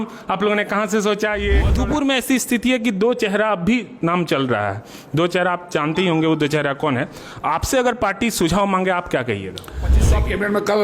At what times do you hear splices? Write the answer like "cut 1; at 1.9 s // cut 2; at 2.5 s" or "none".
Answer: cut 1; at 1.7 s // cut 2; at 10.1 s